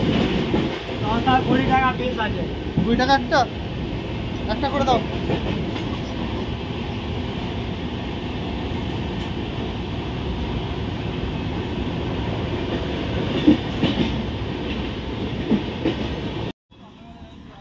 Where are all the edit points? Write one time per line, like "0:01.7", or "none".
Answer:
0:16.6